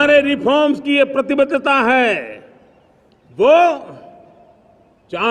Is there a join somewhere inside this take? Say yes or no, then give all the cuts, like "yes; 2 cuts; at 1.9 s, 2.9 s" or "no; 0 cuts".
no; 0 cuts